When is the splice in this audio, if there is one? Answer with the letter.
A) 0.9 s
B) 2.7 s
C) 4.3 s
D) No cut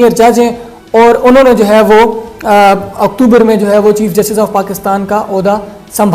D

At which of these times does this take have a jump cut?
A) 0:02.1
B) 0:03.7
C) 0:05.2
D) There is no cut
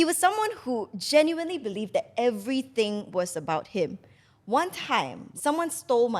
C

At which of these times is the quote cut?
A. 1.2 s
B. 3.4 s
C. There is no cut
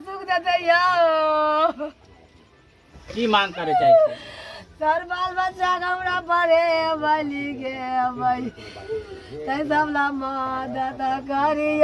C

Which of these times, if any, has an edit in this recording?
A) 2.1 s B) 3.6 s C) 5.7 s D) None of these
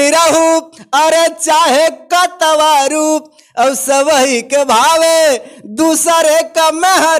D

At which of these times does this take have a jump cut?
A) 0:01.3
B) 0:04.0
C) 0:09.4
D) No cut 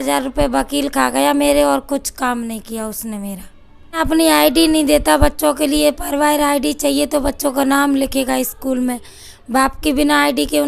B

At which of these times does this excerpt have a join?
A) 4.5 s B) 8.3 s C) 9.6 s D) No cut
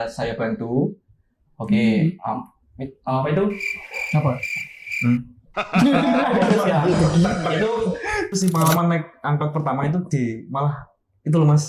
B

